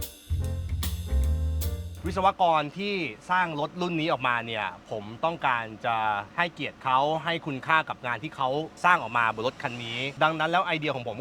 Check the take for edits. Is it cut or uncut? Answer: cut